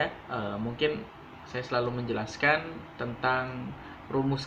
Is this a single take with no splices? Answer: yes; 0 cuts

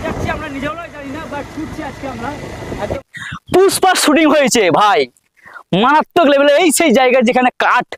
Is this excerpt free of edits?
no; 1 cut; at 3.0 s

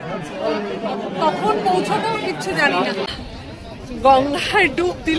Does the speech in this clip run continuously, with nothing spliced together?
no; 1 cut; at 3.1 s

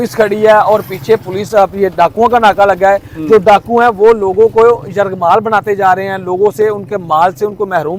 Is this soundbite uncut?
yes; 0 cuts

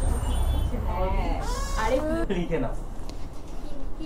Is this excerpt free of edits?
no; 1 cut; at 2.2 s

